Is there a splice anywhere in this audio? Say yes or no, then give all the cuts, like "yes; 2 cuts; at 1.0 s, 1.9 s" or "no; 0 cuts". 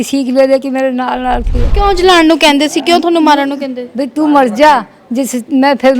yes; 1 cut; at 1.7 s